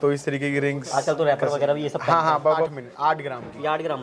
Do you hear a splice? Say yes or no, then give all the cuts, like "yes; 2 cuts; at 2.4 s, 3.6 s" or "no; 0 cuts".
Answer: yes; 1 cut; at 2.7 s